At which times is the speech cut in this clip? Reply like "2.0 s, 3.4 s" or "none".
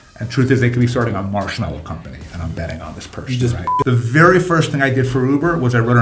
3.7 s